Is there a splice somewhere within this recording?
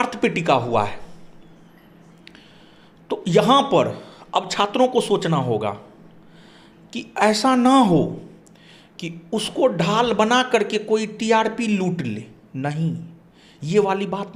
no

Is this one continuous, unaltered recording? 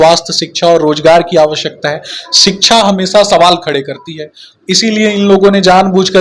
yes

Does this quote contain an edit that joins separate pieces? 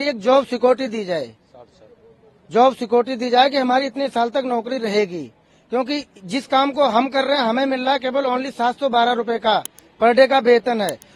no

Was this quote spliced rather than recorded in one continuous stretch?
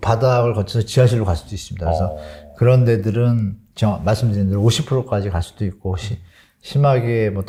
no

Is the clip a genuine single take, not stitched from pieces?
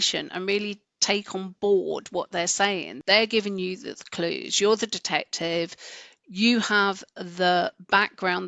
no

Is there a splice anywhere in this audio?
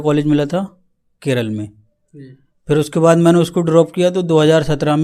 no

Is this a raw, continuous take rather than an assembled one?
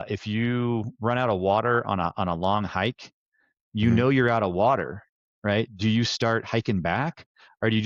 yes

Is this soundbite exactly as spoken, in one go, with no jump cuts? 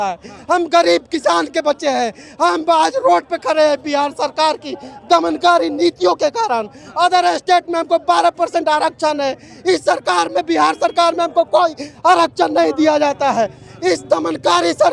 yes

